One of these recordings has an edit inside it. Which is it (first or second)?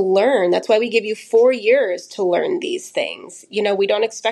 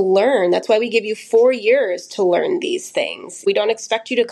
second